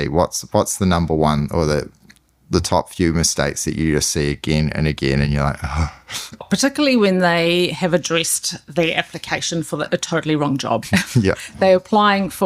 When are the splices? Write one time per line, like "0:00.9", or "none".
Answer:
0:06.4
0:10.8